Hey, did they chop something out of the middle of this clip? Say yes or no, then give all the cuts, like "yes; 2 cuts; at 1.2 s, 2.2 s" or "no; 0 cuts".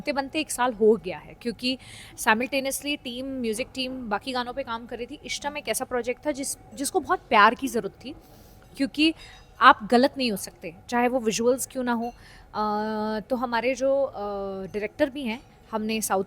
no; 0 cuts